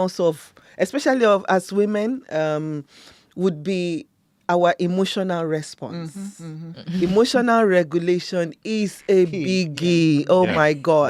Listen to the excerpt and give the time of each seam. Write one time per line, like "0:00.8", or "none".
none